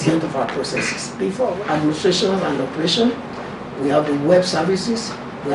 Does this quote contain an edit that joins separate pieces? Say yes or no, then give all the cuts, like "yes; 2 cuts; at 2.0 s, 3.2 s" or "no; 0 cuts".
yes; 1 cut; at 1.5 s